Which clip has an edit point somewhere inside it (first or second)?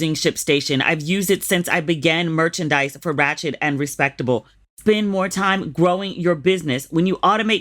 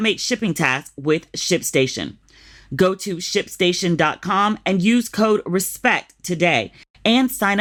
first